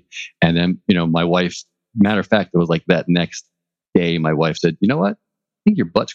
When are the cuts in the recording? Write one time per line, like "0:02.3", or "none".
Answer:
none